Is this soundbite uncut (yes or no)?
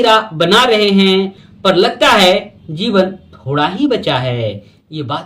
no